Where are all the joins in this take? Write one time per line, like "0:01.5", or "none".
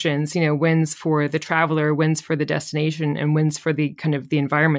none